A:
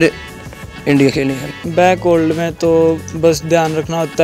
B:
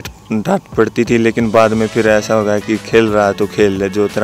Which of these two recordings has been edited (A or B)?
A